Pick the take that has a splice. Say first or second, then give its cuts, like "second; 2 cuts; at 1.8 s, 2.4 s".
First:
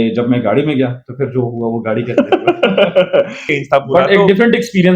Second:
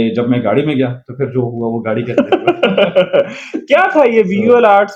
first; 1 cut; at 3.6 s